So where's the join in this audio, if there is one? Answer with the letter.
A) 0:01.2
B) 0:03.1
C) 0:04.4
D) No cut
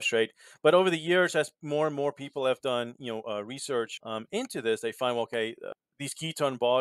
D